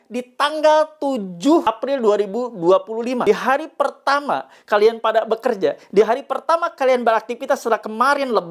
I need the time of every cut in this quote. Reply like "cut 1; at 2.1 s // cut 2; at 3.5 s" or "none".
cut 1; at 1.7 s // cut 2; at 3.2 s